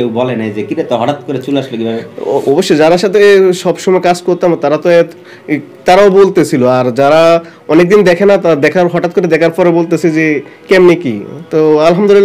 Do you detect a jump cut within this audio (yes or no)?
no